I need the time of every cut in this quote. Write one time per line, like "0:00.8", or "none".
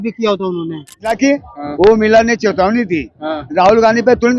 0:01.1